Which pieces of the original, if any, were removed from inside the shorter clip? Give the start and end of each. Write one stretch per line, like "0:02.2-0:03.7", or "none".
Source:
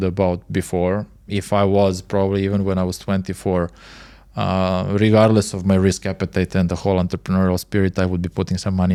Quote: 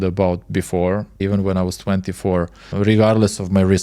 0:01.2-0:02.4
0:03.9-0:04.9